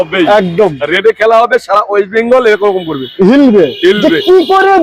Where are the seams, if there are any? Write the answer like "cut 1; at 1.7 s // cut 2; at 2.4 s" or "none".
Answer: none